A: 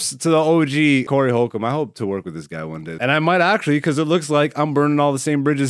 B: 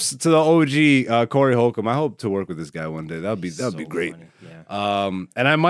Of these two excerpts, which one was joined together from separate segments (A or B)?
A